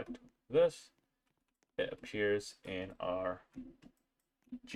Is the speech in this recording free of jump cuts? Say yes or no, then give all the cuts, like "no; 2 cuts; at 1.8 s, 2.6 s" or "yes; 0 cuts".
yes; 0 cuts